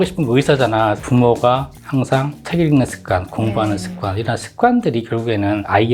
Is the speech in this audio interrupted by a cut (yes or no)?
yes